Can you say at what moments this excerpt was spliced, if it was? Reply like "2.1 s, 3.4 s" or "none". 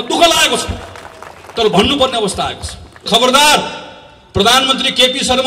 3.0 s